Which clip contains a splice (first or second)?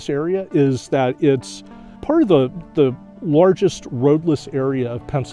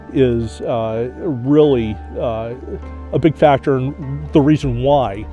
first